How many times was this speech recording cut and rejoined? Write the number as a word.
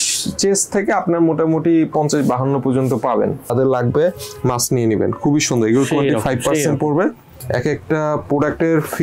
two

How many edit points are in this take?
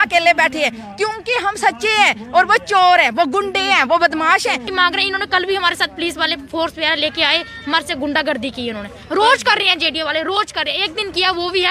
one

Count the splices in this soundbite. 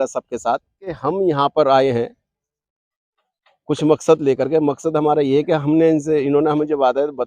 one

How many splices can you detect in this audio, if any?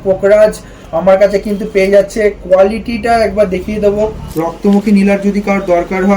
one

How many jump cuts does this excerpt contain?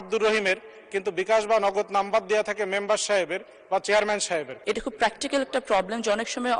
one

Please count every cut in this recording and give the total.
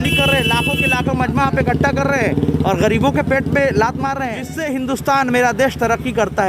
one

